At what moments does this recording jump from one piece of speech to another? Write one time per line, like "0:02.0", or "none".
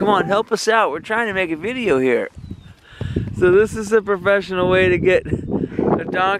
0:02.7